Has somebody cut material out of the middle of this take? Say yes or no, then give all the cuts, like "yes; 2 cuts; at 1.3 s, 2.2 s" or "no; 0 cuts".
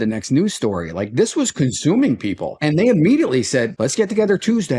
yes; 2 cuts; at 2.5 s, 3.7 s